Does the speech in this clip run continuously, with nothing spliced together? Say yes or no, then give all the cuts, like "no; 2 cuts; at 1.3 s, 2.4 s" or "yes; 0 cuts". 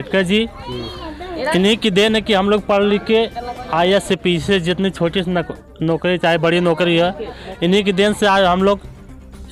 yes; 0 cuts